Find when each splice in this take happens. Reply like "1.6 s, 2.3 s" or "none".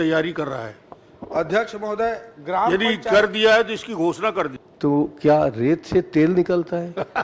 4.6 s